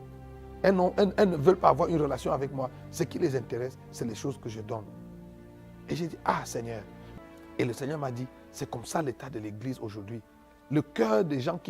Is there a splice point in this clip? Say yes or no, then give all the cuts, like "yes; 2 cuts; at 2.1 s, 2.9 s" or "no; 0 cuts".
yes; 1 cut; at 7.0 s